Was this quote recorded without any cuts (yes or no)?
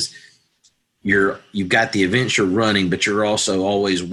yes